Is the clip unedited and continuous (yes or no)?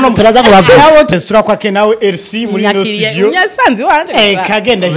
no